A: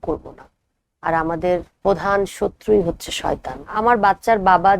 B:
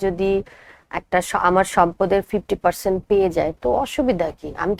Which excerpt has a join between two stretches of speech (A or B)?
A